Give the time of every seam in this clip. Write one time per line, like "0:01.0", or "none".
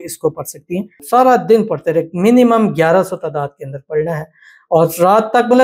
0:00.9